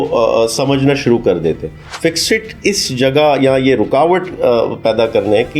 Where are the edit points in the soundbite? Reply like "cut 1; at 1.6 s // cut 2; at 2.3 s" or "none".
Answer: none